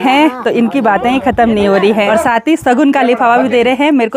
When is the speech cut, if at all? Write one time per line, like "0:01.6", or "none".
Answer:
0:02.1